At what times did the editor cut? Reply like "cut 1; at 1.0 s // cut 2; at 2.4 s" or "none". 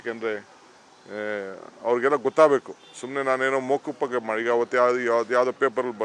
cut 1; at 2.4 s